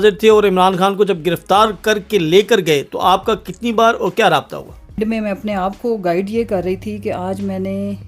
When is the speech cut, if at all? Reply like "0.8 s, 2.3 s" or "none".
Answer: 5.0 s